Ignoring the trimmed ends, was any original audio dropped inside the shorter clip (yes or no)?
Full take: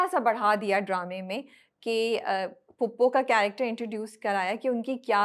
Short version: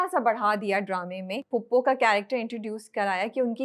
yes